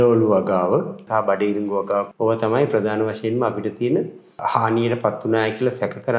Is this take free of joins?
no; 3 cuts; at 1.0 s, 2.1 s, 4.4 s

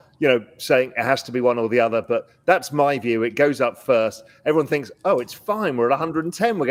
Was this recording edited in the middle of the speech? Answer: no; 0 cuts

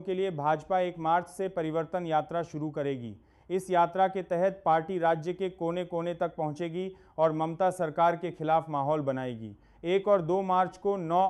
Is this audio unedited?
yes; 0 cuts

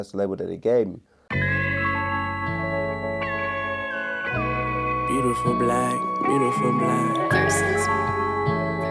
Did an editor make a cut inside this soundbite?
yes; 1 cut; at 1.4 s

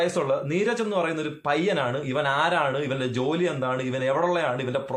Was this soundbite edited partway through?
no; 0 cuts

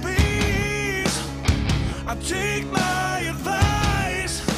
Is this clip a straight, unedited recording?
yes; 0 cuts

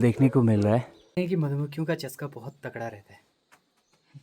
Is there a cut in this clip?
yes; 1 cut; at 1.0 s

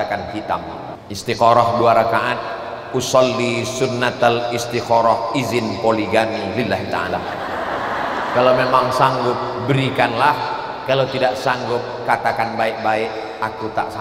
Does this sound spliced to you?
yes; 1 cut; at 1.0 s

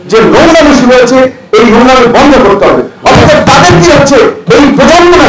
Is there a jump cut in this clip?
no; 0 cuts

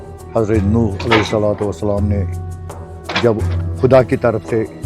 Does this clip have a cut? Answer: yes; 1 cut; at 3.6 s

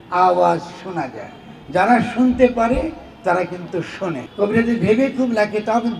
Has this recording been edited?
yes; 1 cut; at 4.2 s

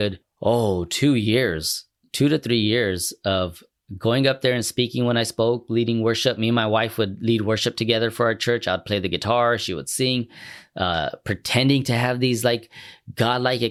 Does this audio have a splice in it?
no; 0 cuts

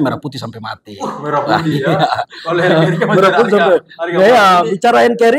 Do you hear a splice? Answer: no; 0 cuts

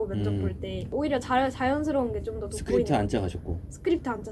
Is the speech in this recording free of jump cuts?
yes; 0 cuts

